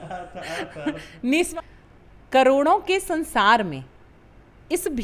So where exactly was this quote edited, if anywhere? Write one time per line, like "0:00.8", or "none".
0:01.5

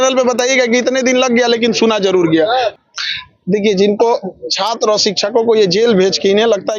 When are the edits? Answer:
0:02.8

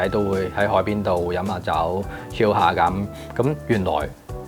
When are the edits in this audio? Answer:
none

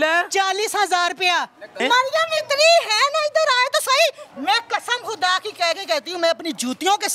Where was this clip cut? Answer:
0:01.8

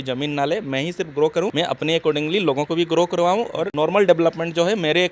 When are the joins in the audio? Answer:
0:01.5
0:03.6

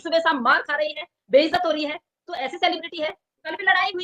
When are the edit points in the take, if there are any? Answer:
none

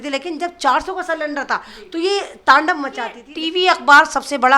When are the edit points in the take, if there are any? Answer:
0:03.2

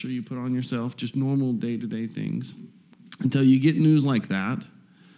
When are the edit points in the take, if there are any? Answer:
0:03.0

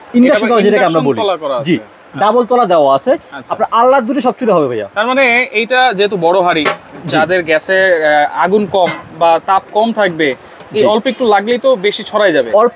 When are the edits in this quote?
none

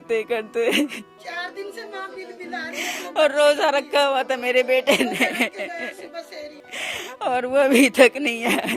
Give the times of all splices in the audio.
0:01.1
0:06.6

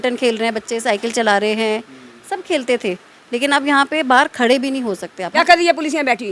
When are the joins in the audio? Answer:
0:05.2

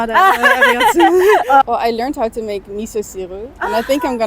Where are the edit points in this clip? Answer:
0:01.6

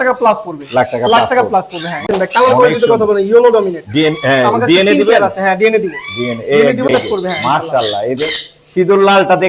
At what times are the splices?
0:02.1
0:06.9

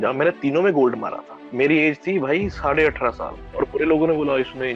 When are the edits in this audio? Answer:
0:01.5
0:03.5

